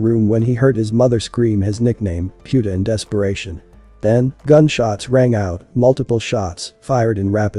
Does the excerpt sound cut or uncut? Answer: uncut